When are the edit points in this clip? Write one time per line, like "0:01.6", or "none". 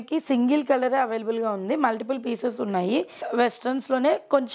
0:03.3